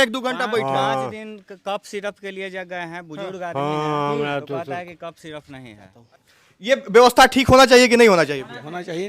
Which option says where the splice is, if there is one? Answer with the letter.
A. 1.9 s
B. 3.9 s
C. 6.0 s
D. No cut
C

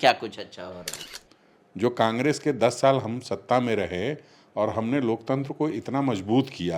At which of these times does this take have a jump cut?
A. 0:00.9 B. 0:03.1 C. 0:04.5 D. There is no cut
A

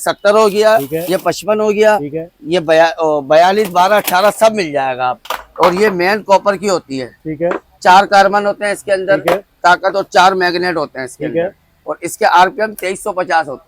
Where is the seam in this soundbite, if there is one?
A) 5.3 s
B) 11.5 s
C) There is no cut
A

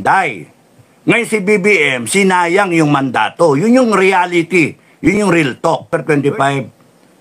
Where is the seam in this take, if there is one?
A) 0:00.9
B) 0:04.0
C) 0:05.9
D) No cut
C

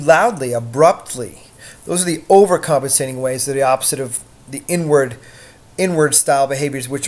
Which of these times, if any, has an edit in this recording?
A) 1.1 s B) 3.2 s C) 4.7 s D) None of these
D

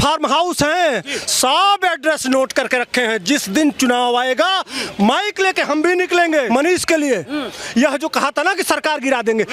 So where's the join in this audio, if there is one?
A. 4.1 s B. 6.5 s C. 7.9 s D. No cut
B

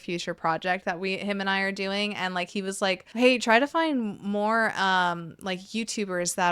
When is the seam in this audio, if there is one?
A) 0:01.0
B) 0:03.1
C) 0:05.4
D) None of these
B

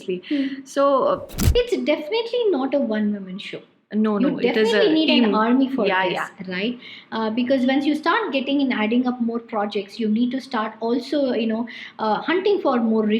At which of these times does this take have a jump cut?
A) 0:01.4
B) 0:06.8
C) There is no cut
A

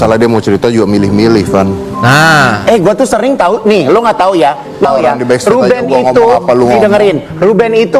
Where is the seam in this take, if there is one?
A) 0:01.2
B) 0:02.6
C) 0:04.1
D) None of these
D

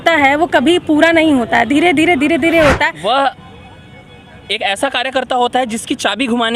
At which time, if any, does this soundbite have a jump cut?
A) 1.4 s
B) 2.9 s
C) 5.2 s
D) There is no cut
B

